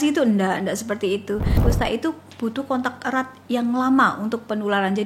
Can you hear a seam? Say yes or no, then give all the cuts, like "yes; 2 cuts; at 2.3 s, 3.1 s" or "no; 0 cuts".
yes; 1 cut; at 1.6 s